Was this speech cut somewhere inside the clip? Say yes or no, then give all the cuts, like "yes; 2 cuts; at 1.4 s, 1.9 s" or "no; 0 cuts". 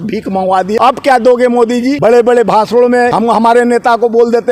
yes; 3 cuts; at 0.8 s, 2.0 s, 3.1 s